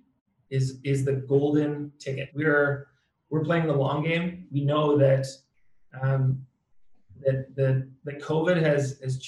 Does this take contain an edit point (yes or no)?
yes